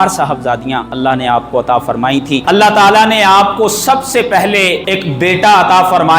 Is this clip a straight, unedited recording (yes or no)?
no